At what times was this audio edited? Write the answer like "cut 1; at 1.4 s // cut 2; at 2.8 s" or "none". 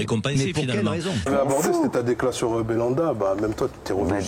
cut 1; at 1.3 s